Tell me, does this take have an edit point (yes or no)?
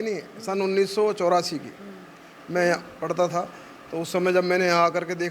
no